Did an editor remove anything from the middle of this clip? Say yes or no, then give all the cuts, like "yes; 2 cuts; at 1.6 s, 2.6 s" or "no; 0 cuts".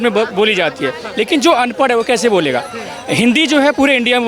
no; 0 cuts